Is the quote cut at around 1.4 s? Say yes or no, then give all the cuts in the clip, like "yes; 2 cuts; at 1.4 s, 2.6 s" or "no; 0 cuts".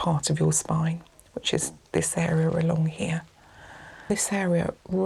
no; 1 cut; at 4.1 s